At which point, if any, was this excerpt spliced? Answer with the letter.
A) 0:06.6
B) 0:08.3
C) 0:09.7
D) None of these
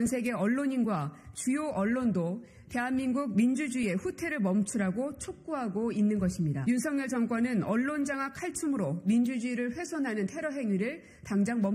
A